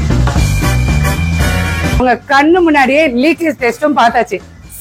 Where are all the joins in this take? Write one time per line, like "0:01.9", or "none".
0:02.0